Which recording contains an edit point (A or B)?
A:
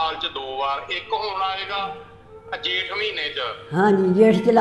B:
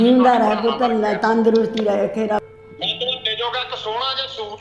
B